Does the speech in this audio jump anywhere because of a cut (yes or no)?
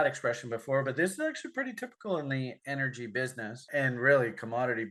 no